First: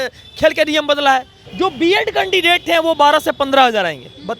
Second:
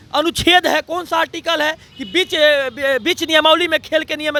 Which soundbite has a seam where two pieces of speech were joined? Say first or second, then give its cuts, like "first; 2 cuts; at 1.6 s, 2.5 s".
first; 1 cut; at 1.4 s